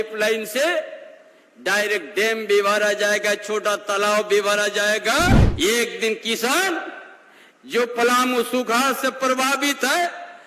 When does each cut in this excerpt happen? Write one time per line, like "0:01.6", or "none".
0:05.5